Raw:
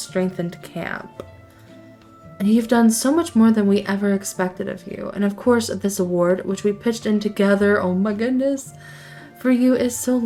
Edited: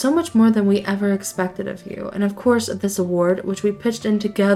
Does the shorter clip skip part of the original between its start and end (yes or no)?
no